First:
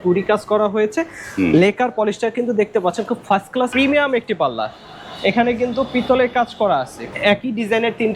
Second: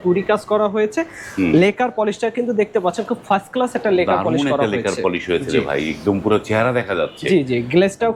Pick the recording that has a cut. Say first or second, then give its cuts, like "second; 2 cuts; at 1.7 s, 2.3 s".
first; 2 cuts; at 3.7 s, 7.0 s